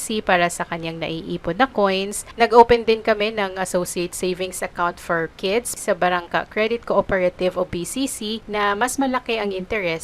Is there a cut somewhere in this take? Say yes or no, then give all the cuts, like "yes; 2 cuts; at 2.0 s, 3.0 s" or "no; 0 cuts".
yes; 3 cuts; at 2.2 s, 5.7 s, 8.4 s